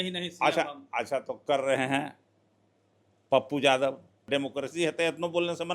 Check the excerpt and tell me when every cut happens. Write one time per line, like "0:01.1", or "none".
0:04.3

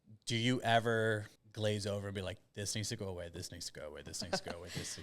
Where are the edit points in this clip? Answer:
0:01.3

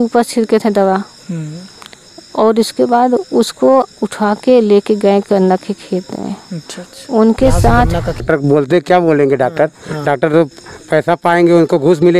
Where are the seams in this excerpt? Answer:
0:08.2

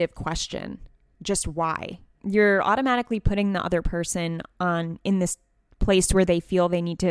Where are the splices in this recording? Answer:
0:02.1

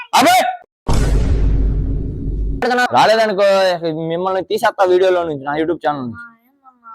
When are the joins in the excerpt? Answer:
0:02.8

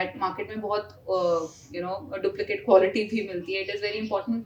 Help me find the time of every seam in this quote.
none

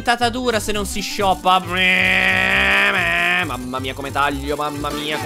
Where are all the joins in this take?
none

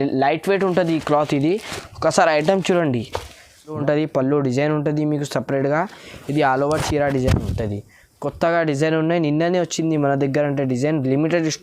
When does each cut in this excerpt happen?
0:03.8

